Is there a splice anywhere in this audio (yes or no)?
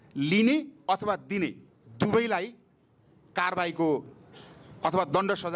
no